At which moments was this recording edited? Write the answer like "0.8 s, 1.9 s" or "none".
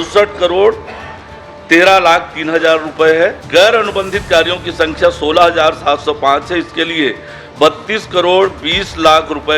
3.4 s